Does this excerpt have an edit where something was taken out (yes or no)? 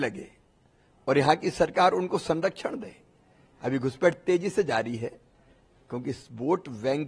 no